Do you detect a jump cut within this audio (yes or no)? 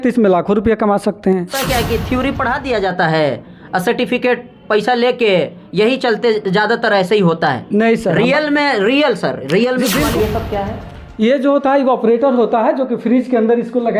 yes